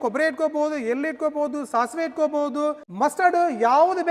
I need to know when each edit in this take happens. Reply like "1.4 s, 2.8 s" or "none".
2.8 s